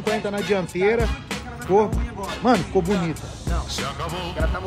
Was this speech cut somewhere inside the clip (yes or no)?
no